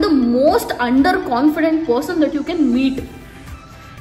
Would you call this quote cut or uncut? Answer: uncut